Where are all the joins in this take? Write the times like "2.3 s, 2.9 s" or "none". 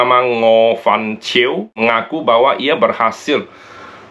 1.7 s